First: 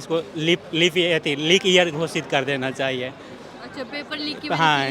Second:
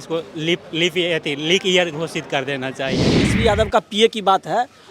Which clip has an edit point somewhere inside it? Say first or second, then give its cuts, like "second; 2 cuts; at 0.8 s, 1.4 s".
second; 1 cut; at 3.3 s